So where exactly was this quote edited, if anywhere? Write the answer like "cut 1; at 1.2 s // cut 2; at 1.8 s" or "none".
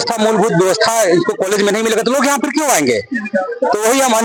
none